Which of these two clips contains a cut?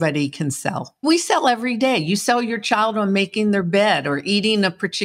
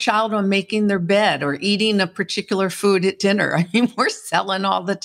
first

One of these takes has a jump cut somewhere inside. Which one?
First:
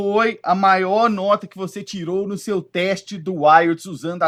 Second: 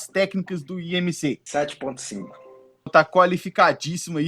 second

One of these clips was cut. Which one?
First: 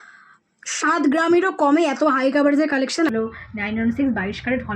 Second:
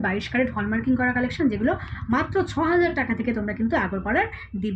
first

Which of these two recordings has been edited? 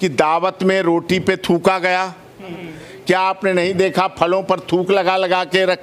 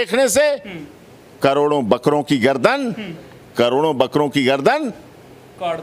first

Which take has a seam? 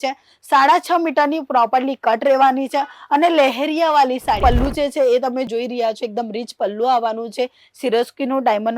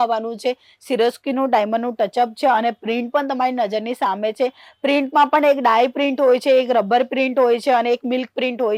first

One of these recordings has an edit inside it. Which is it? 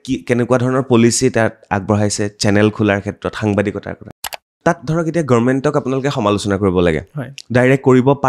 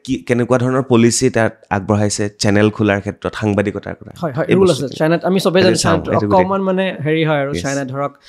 first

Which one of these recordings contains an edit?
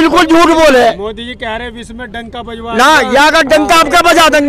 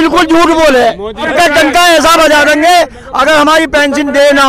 second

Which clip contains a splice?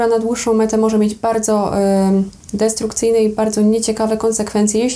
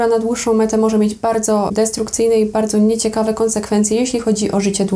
second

